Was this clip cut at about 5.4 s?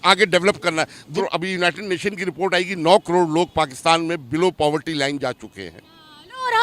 no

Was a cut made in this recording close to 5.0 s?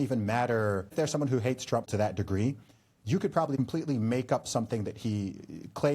no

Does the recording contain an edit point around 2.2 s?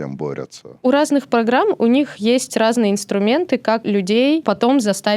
no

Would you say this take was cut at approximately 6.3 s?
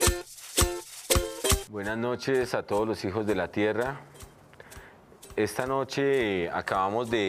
no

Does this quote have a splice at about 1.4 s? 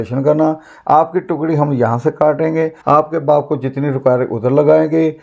no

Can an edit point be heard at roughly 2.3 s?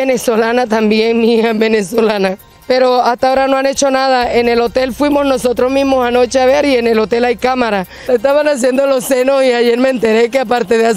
yes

